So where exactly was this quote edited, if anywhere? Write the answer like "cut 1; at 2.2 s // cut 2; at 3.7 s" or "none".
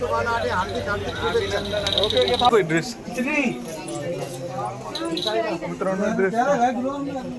cut 1; at 2.5 s